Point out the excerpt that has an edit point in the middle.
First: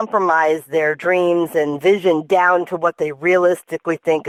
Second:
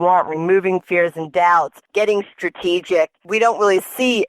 second; 2 cuts; at 1.8 s, 3.3 s

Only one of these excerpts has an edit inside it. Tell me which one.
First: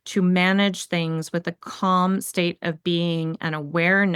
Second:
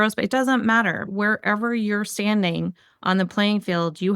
second; 1 cut; at 1.0 s

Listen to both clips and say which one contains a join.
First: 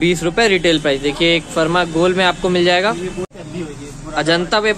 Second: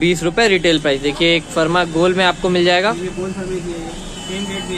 first; 1 cut; at 3.3 s

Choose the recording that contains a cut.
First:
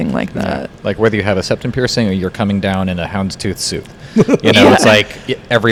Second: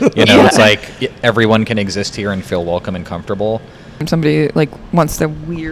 second; 1 cut; at 4.0 s

